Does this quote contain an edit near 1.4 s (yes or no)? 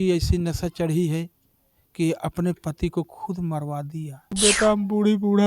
no